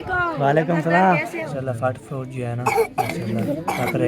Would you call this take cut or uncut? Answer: cut